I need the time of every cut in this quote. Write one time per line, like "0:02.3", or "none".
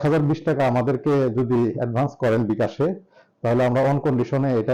none